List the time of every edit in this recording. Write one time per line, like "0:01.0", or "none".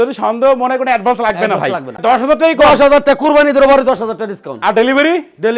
0:02.0